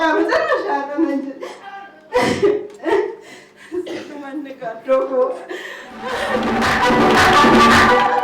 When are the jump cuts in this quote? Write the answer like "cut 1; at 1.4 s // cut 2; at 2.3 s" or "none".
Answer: cut 1; at 6.4 s